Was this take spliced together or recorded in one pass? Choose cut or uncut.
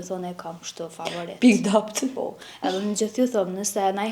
uncut